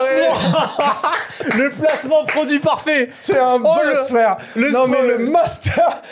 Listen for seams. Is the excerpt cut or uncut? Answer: uncut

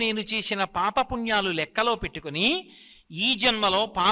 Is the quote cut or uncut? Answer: uncut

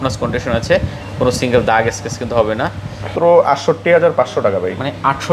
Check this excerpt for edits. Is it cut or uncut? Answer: cut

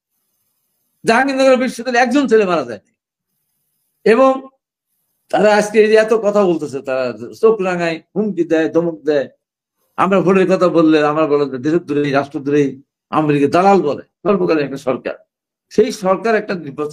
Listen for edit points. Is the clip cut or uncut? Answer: cut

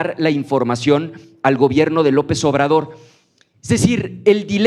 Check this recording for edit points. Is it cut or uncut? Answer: uncut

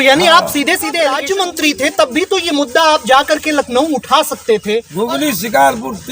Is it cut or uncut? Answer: cut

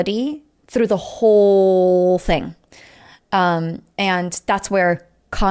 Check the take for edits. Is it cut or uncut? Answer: uncut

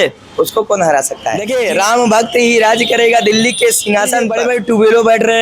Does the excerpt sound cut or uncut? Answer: cut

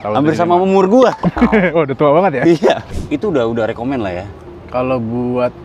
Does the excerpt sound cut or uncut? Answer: cut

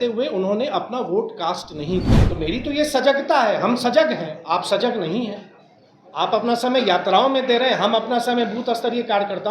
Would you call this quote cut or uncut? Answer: cut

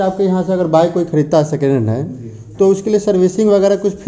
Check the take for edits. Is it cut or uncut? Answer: uncut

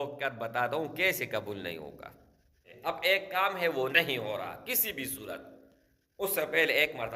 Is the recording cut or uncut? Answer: cut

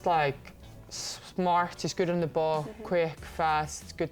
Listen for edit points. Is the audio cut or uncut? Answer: uncut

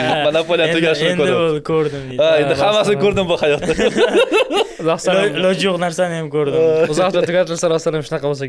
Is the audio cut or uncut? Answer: uncut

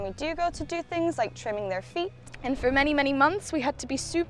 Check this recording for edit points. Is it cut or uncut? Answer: cut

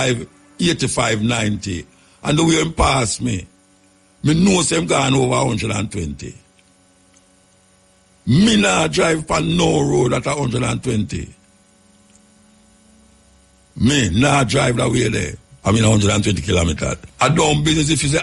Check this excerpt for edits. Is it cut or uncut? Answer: cut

